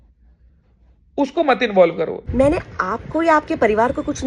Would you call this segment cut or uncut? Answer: cut